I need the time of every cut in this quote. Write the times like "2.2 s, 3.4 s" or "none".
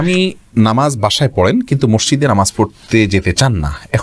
none